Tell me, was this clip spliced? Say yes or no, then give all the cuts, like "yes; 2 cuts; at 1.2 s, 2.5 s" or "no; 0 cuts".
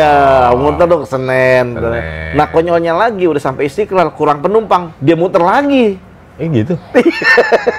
no; 0 cuts